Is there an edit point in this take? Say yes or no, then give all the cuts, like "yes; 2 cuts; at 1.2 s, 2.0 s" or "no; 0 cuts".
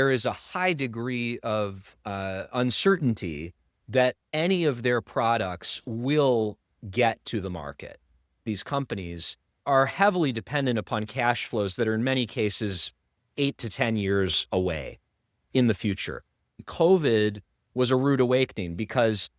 yes; 3 cuts; at 8.4 s, 9.5 s, 16.6 s